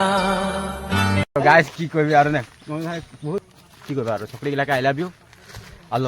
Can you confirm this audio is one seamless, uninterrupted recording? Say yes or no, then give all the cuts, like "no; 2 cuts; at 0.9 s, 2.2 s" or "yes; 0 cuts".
no; 1 cut; at 3.4 s